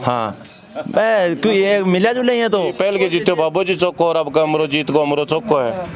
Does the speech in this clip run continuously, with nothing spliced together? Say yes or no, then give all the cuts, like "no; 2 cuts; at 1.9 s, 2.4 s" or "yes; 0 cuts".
no; 1 cut; at 2.7 s